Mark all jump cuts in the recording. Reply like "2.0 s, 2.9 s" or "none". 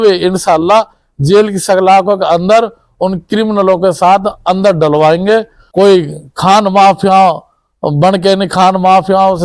5.6 s